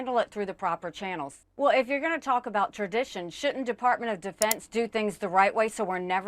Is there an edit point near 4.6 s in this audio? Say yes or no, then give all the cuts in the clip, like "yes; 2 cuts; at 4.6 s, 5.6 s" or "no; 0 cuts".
no; 1 cut; at 1.3 s